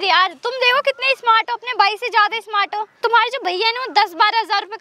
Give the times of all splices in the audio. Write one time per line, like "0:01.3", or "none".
0:03.0